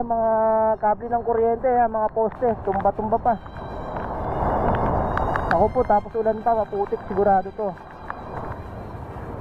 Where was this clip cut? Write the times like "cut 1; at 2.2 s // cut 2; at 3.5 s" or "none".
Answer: cut 1; at 8.5 s